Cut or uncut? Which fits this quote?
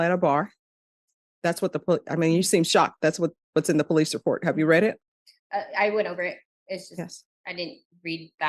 uncut